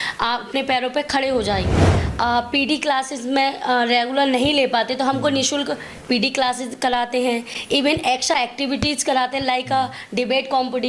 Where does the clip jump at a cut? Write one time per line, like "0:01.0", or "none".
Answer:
0:02.0